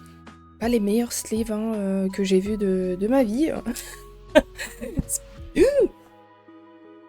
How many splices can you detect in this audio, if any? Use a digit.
0